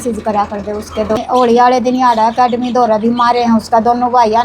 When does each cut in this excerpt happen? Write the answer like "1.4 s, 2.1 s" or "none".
1.2 s